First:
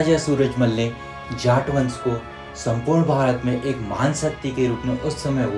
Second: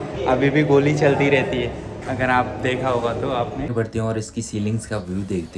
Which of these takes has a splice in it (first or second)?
second